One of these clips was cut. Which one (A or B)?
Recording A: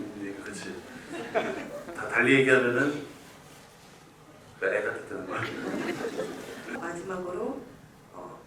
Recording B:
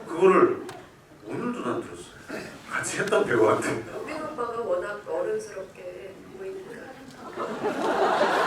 A